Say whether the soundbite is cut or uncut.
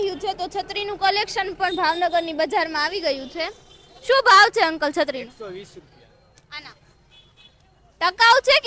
uncut